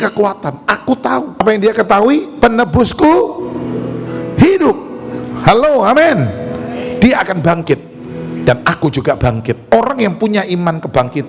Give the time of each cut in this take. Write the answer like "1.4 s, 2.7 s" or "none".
1.4 s, 9.7 s